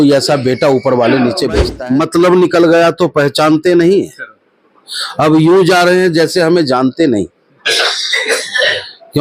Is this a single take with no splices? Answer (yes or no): no